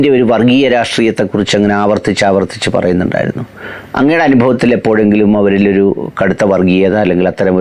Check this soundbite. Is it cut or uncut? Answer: uncut